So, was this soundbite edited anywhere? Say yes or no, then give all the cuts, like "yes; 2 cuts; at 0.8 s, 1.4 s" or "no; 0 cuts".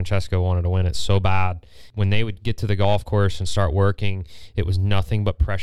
no; 0 cuts